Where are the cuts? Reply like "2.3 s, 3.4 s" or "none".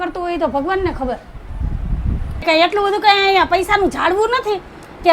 2.4 s